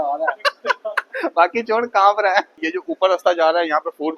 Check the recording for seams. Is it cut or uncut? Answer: cut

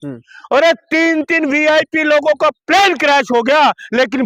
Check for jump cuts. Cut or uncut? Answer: uncut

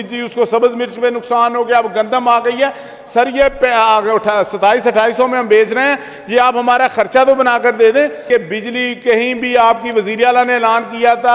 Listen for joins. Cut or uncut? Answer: cut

